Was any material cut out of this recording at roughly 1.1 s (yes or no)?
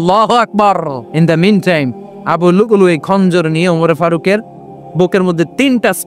yes